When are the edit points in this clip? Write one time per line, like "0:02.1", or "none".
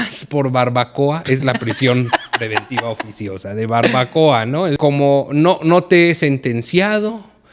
0:04.8

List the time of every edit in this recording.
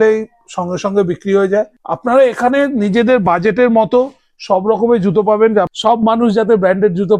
0:01.8
0:05.7

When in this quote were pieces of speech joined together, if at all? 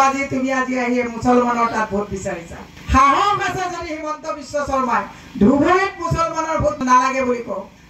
none

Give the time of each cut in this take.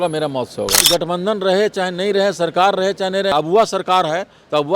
0:00.8
0:03.3

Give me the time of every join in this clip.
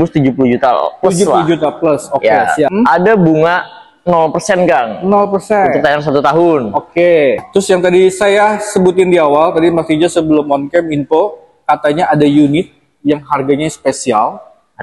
0:02.7
0:07.4

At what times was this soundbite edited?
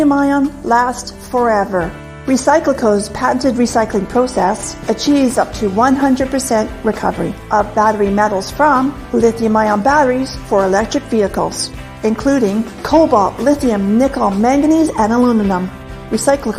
0:01.0

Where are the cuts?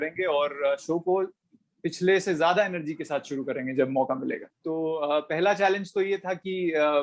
0:04.5

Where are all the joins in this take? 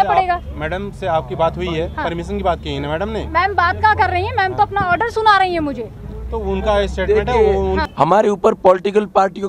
0:07.8

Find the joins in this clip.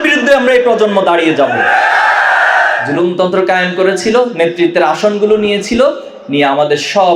0:02.8

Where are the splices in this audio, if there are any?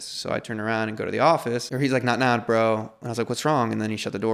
0:01.7

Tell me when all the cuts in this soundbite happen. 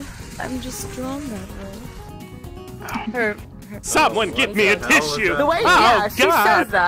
none

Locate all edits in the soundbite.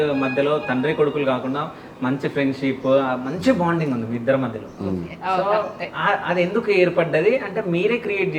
none

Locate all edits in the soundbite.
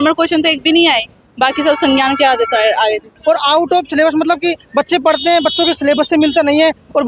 0:03.2

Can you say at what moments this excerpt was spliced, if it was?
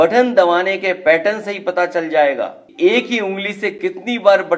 0:02.6

